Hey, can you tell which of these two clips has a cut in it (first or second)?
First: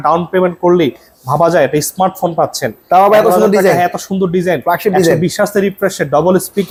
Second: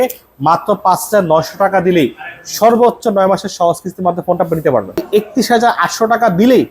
second